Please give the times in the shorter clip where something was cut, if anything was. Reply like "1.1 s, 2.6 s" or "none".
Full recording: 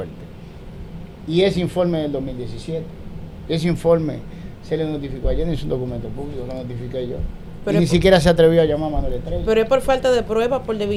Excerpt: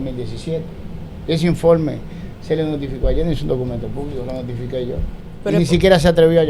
none